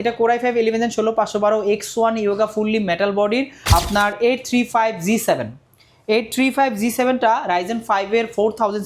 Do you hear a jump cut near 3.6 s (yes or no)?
yes